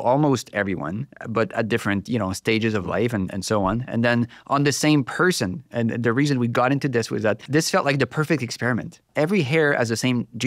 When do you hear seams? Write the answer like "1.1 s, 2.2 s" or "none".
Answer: 7.4 s, 9.1 s

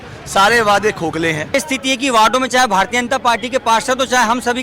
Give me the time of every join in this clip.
1.5 s

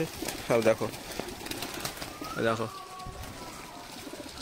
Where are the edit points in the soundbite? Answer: none

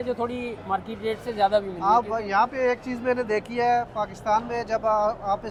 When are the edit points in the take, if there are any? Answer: none

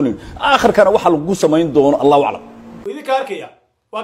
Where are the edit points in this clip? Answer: 3.0 s

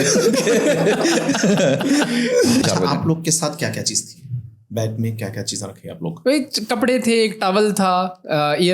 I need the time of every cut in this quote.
2.6 s, 6.1 s

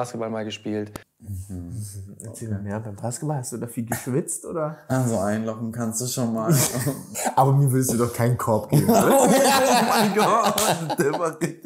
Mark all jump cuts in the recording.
7.1 s

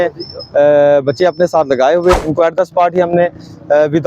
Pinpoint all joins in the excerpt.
2.2 s

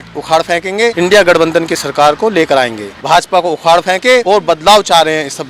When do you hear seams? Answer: 0.9 s, 2.9 s, 4.2 s

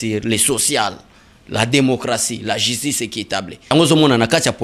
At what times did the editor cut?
3.7 s

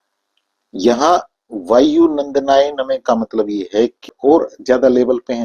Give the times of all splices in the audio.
4.0 s

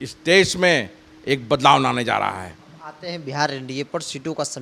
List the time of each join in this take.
none

